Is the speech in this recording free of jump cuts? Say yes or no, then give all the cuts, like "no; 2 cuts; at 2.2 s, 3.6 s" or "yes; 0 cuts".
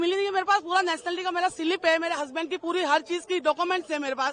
yes; 0 cuts